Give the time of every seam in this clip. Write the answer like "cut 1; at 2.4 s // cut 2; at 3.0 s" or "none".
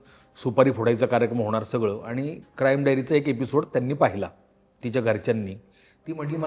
none